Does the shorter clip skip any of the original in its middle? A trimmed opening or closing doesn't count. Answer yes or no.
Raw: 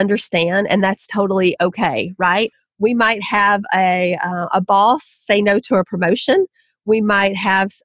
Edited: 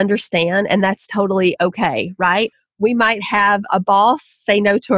yes